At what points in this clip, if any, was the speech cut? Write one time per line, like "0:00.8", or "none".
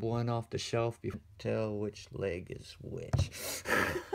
none